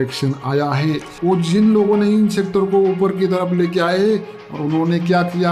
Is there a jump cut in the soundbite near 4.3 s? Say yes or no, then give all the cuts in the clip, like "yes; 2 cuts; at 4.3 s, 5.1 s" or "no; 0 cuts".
no; 1 cut; at 1.1 s